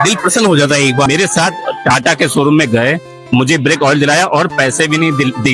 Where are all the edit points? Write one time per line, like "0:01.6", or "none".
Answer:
0:01.1

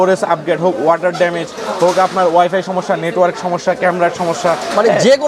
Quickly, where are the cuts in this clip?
none

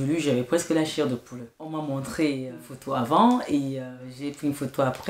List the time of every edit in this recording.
0:01.6

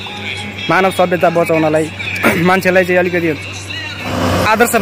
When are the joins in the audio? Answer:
none

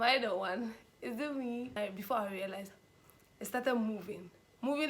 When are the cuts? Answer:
0:01.8

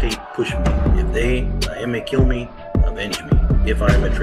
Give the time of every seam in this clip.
none

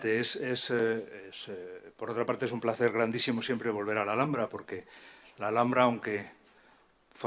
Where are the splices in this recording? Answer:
none

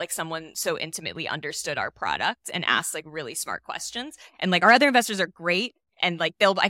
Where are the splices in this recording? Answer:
none

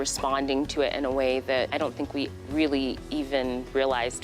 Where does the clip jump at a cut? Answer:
0:01.7

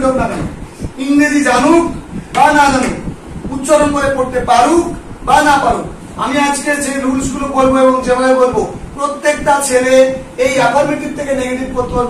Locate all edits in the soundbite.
none

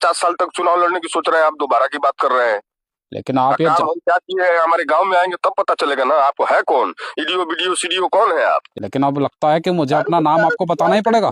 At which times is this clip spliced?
0:08.8

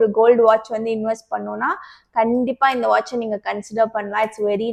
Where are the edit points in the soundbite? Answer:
none

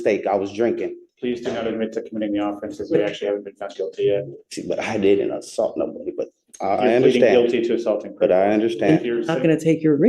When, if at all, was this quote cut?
0:01.0
0:04.4

